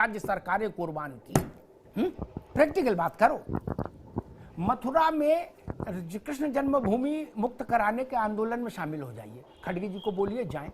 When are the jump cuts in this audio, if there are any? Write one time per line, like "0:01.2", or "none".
0:01.8